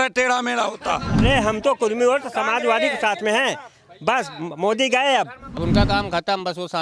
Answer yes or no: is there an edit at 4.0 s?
no